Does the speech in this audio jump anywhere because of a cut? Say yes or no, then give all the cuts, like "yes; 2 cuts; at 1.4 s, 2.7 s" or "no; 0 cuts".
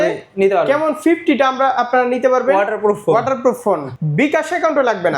yes; 1 cut; at 4.0 s